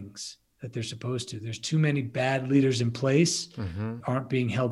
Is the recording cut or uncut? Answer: uncut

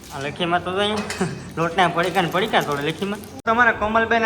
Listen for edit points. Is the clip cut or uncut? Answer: cut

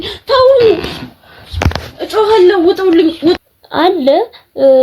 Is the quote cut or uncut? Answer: cut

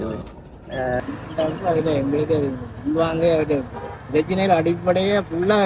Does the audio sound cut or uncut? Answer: cut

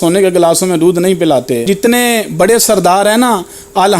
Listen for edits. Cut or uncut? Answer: cut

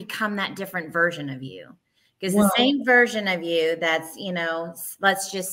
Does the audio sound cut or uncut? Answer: uncut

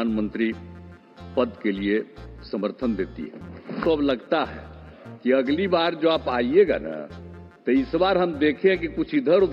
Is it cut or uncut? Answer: cut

